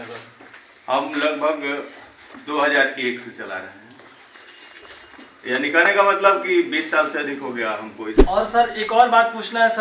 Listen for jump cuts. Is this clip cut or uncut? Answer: cut